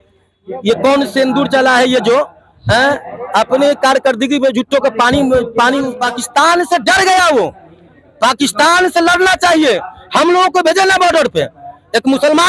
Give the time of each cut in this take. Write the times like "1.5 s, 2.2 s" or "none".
5.9 s